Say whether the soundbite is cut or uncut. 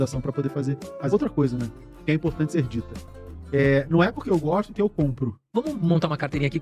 cut